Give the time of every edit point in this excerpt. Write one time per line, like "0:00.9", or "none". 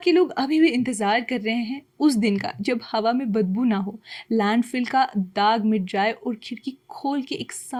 none

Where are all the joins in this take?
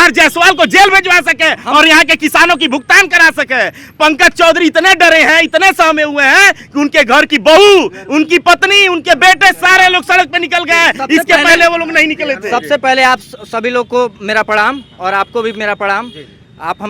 none

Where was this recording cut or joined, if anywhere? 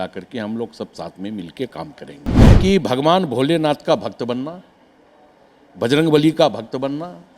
0:02.5

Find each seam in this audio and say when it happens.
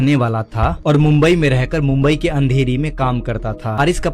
none

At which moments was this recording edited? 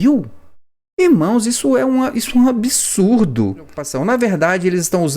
0:03.8

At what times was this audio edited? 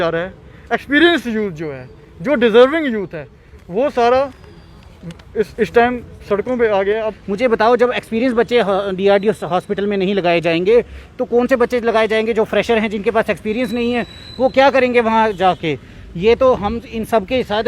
0:07.1

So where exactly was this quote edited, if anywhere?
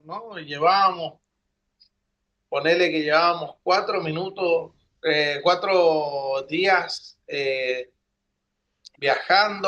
none

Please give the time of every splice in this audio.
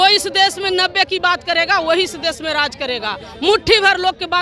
none

